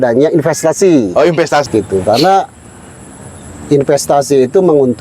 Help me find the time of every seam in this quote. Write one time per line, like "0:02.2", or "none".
0:01.6